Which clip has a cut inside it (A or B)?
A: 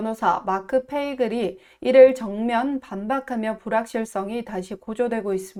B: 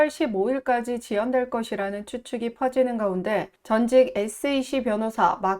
B